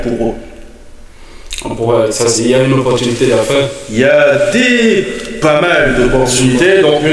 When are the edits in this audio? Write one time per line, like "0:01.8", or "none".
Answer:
none